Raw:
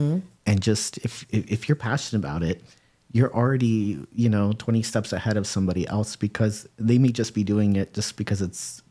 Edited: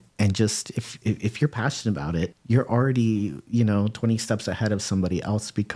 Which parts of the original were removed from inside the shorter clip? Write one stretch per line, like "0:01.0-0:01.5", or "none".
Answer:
0:02.6-0:03.0